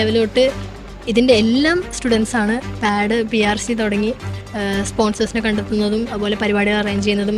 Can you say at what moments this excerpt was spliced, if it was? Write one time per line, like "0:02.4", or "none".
none